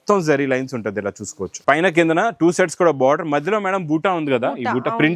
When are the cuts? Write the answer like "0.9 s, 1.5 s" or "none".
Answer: 1.5 s